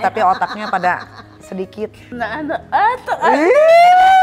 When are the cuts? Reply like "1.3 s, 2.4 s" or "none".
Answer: 2.1 s